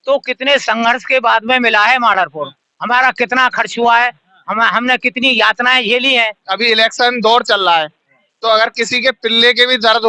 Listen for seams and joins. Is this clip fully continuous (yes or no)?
no